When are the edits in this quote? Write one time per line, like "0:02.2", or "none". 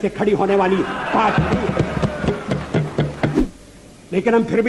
0:03.4